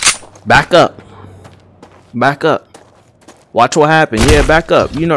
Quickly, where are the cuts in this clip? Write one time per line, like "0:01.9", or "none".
none